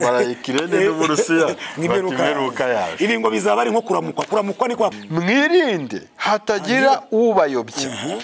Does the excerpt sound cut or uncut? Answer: cut